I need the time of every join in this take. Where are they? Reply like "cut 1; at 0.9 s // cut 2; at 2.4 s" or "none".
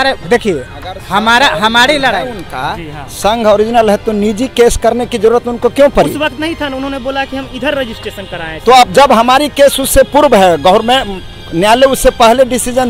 none